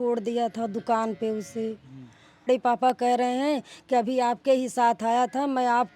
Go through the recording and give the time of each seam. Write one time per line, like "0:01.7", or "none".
0:02.5